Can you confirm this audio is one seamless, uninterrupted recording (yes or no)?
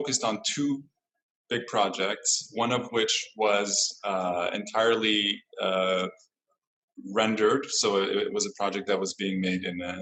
yes